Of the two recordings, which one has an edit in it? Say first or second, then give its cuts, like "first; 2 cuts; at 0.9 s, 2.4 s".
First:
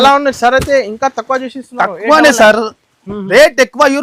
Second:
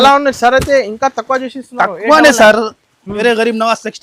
second; 1 cut; at 3.1 s